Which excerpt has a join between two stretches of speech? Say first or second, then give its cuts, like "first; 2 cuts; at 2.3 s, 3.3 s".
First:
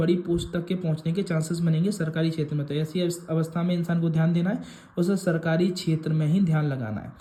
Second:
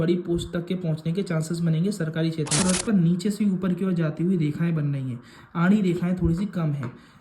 second; 1 cut; at 2.6 s